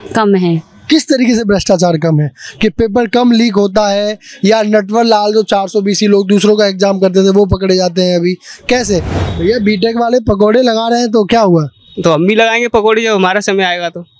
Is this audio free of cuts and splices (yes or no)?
no